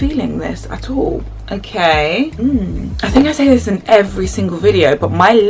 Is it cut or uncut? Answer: cut